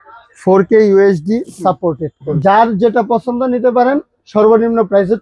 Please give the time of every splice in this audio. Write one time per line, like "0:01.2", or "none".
0:02.2